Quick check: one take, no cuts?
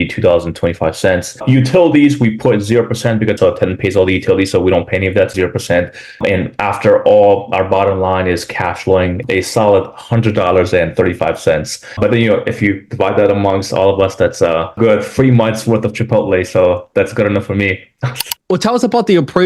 no; 2 cuts; at 3.4 s, 18.3 s

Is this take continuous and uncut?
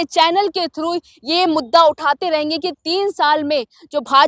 yes; 0 cuts

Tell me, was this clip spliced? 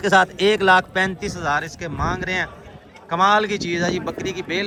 no; 0 cuts

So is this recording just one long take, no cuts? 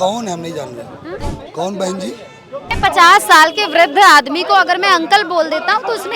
no; 2 cuts; at 1.2 s, 2.7 s

